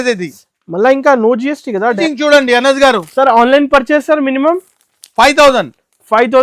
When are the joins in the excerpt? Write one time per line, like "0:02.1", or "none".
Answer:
0:02.0